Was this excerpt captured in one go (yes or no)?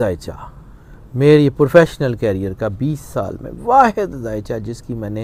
yes